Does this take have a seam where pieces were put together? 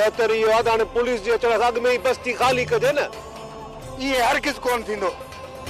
no; 0 cuts

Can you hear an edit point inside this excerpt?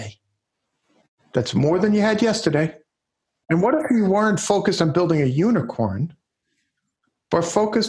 yes; 1 cut; at 3.4 s

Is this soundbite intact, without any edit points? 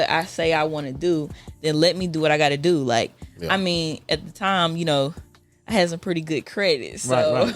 no; 1 cut; at 4.0 s

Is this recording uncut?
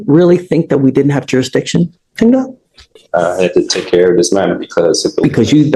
yes; 0 cuts

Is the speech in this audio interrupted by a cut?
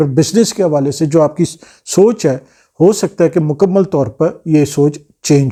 no; 0 cuts

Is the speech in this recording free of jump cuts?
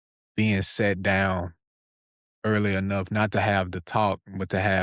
yes; 0 cuts

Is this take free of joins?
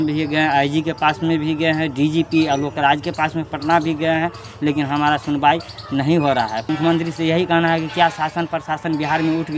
no; 1 cut; at 6.6 s

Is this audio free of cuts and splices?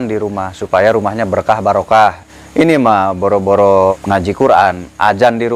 no; 2 cuts; at 2.3 s, 4.0 s

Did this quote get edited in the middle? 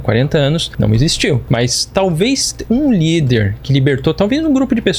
yes; 1 cut; at 1.4 s

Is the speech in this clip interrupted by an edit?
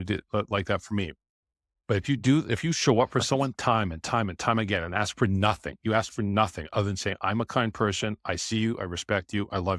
no; 0 cuts

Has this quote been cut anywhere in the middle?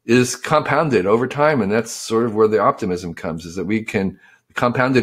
no; 0 cuts

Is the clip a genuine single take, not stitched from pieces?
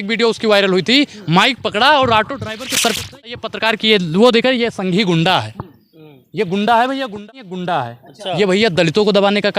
no; 2 cuts; at 3.5 s, 7.3 s

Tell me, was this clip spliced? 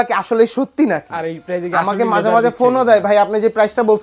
no; 0 cuts

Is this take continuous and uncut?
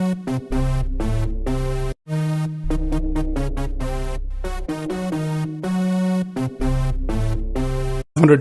yes; 0 cuts

